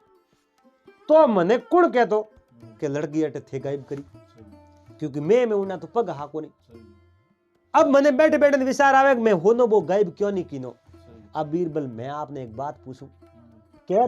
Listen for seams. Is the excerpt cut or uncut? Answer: cut